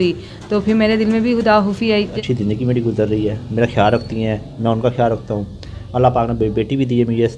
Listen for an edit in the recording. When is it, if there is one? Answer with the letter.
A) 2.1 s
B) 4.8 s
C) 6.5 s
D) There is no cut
A